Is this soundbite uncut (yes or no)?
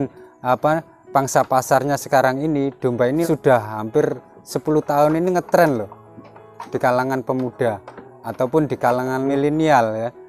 no